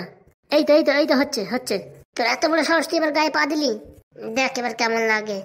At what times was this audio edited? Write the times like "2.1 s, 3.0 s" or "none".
none